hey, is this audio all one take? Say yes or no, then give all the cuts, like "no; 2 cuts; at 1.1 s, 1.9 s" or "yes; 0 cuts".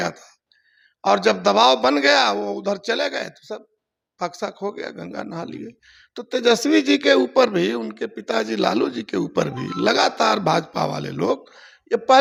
yes; 0 cuts